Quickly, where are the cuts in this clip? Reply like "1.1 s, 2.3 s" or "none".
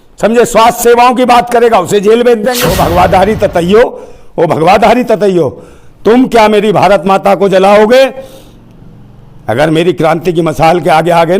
2.5 s